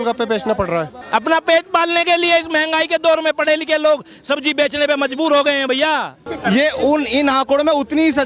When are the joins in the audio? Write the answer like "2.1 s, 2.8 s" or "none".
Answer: 1.0 s, 6.3 s